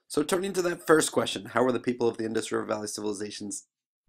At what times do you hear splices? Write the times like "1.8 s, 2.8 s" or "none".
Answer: none